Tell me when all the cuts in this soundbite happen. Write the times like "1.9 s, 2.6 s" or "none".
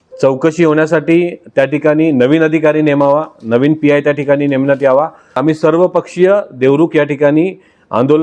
5.4 s